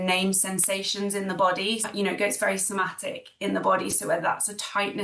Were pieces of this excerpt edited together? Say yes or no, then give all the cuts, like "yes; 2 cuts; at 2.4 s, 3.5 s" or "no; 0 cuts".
yes; 1 cut; at 1.8 s